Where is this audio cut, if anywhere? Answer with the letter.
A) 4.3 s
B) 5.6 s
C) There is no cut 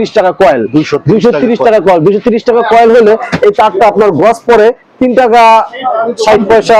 C